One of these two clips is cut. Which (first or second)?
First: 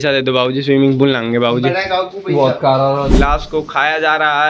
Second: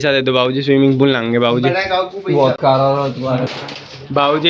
first